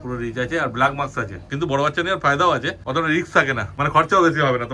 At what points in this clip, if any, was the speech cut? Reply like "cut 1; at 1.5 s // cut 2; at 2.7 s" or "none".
cut 1; at 1.4 s // cut 2; at 2.8 s // cut 3; at 3.7 s